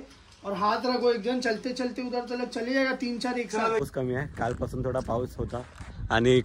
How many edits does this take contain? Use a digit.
1